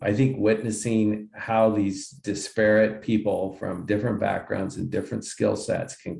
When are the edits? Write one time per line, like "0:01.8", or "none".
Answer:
none